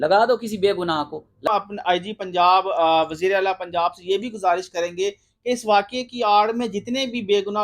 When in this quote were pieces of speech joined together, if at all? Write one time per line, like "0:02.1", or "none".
0:01.5